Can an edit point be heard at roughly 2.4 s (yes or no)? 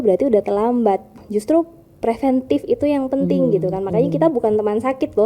no